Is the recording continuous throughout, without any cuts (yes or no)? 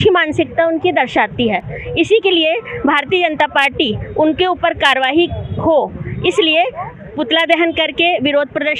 yes